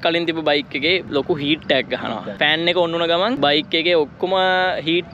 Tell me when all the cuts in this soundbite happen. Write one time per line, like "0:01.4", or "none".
0:02.3